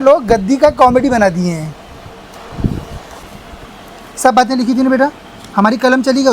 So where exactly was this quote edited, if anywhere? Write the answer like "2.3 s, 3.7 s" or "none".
3.3 s